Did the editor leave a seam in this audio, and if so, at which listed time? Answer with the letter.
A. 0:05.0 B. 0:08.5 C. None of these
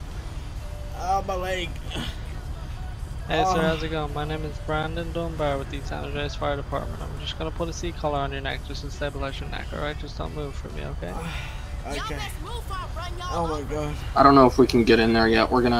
C